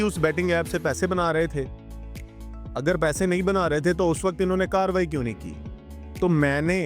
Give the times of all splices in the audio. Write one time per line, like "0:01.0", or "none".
none

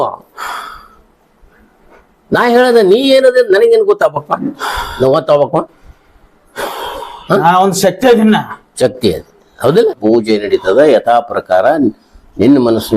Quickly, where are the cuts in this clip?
0:10.0

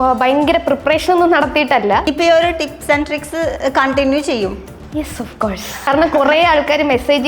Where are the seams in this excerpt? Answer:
0:02.1
0:05.9

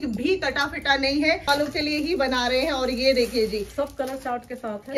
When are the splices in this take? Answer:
0:01.5

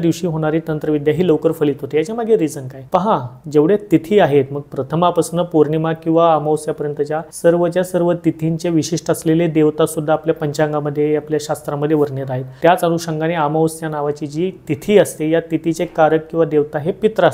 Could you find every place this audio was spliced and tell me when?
none

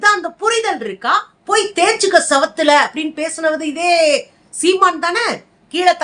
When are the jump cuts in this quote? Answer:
0:01.3

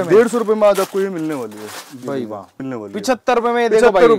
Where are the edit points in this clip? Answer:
0:02.6

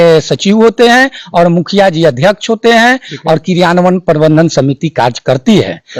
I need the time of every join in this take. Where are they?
none

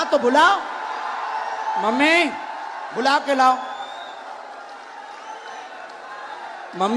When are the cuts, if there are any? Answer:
none

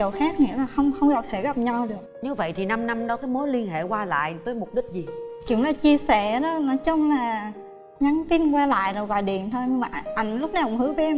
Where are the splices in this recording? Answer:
none

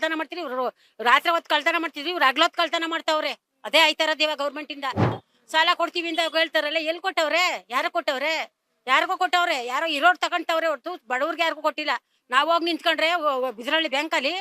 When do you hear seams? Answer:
0:05.2

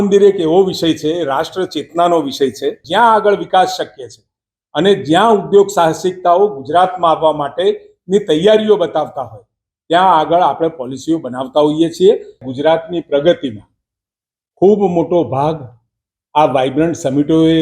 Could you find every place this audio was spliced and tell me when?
0:02.8
0:12.4

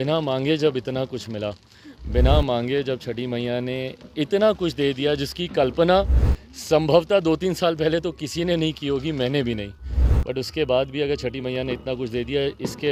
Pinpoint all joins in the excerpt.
none

